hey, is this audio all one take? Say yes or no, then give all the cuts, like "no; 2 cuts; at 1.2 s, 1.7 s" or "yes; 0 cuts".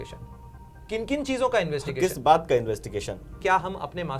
no; 1 cut; at 3.3 s